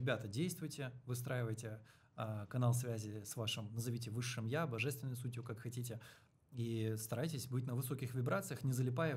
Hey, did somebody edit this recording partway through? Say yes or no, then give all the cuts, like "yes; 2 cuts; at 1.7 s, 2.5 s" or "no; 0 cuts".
no; 0 cuts